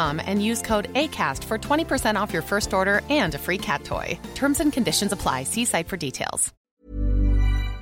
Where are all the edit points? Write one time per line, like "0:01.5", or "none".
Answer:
0:06.5